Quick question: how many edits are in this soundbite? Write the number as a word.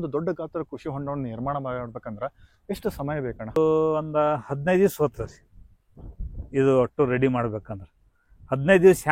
zero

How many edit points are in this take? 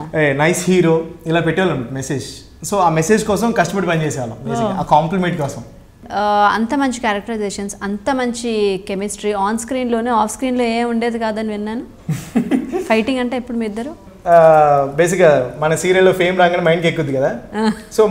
two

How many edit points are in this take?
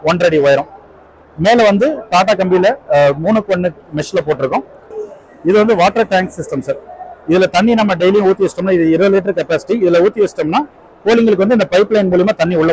one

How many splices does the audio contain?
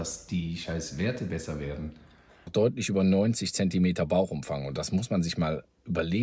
one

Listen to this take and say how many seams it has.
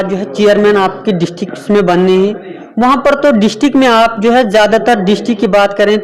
zero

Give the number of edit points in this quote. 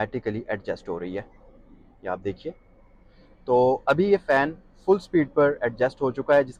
zero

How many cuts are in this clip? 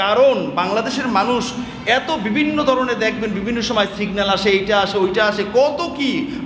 zero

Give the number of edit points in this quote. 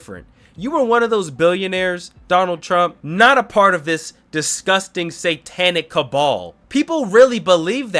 two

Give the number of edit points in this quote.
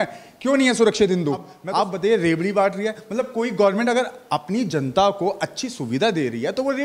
one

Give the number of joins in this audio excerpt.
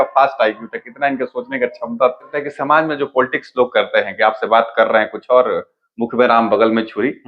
one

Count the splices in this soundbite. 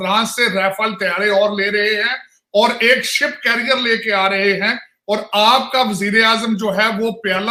zero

